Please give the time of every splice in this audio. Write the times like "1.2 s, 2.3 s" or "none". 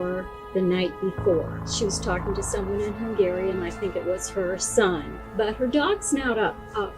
1.7 s, 5.1 s

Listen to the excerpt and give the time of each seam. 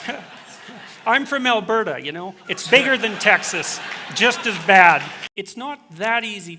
5.2 s

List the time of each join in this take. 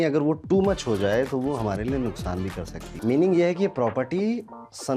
2.8 s

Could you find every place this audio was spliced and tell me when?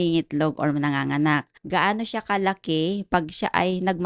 1.5 s

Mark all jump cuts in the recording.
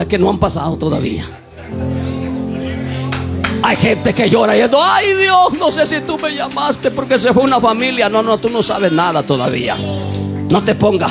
none

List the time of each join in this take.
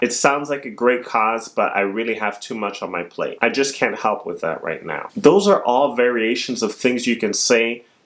none

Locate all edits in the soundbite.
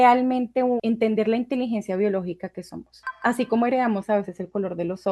0.8 s, 3.0 s

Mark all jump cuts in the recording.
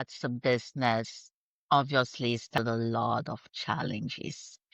2.6 s

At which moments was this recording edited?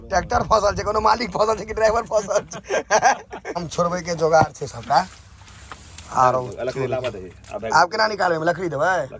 none

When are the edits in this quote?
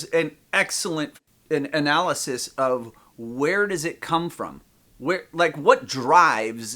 1.2 s

